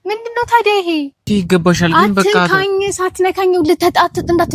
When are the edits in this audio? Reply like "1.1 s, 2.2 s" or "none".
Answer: 1.3 s